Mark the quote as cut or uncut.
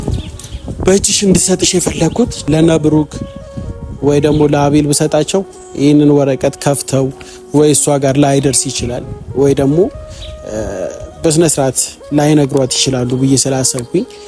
cut